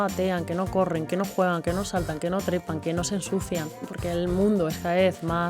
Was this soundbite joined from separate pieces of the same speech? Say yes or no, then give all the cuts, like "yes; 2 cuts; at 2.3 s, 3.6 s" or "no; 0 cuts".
yes; 1 cut; at 3.8 s